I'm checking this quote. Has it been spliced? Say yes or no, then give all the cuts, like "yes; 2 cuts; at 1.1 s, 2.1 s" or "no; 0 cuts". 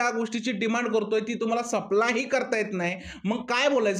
no; 0 cuts